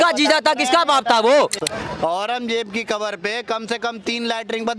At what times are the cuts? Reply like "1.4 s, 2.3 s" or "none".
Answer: 1.6 s